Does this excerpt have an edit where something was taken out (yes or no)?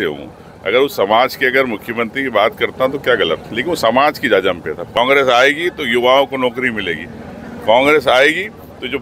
yes